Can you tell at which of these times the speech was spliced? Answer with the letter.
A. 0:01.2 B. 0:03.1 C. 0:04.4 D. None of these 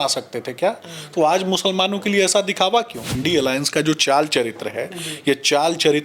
B